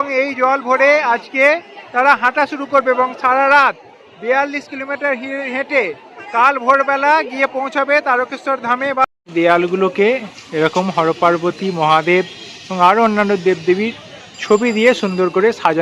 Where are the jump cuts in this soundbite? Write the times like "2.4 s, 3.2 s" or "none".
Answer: 9.1 s